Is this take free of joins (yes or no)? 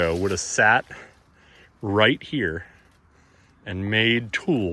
yes